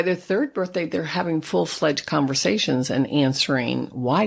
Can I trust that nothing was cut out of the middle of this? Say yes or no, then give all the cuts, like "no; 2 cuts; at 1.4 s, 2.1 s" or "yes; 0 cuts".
yes; 0 cuts